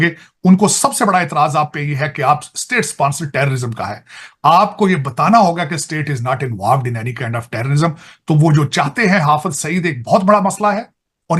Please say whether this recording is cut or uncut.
uncut